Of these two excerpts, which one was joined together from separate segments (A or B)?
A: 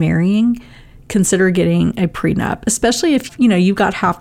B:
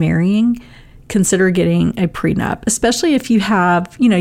A